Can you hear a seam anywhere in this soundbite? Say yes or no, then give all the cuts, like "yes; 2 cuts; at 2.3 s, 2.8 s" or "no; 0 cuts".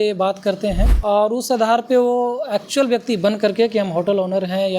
yes; 1 cut; at 0.9 s